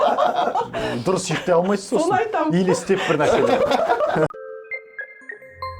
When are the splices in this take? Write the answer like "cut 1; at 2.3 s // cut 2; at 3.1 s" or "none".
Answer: cut 1; at 4.3 s